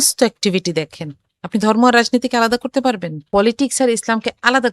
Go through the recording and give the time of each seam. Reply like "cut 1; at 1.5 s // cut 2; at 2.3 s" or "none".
cut 1; at 3.3 s

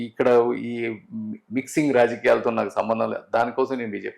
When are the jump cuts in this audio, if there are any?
none

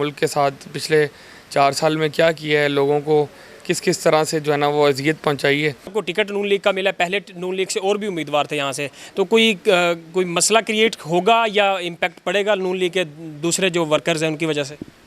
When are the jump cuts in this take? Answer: cut 1; at 5.9 s

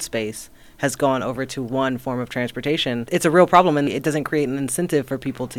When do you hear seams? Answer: cut 1; at 3.0 s // cut 2; at 3.9 s

